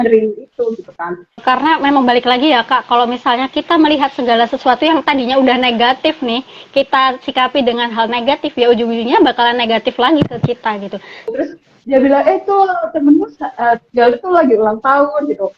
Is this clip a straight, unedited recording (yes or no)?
no